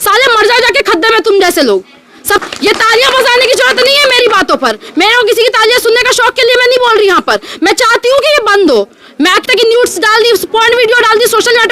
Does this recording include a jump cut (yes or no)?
yes